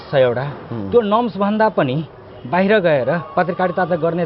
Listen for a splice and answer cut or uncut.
uncut